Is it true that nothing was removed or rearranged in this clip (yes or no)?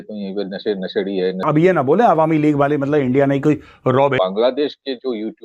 no